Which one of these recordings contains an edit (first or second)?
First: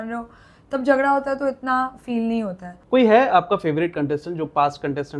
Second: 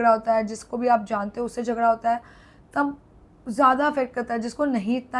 first